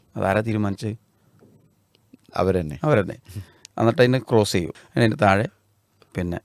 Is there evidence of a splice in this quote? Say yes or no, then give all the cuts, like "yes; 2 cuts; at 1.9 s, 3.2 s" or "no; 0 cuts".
yes; 1 cut; at 4.7 s